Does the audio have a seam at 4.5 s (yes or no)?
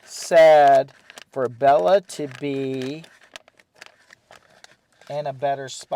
no